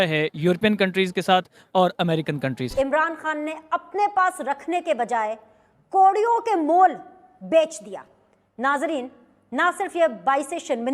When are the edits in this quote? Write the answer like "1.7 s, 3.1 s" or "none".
2.7 s

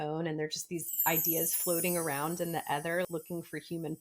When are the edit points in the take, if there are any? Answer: 3.1 s

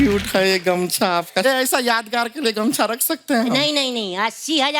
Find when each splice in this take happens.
1.4 s

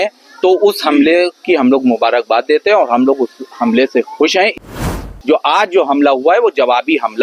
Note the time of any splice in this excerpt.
4.8 s

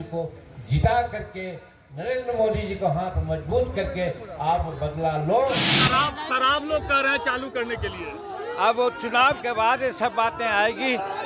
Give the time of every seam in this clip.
5.7 s

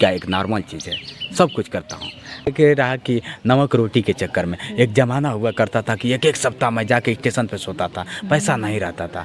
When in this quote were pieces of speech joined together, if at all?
2.5 s

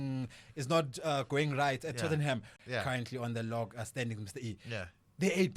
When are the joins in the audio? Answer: 2.5 s

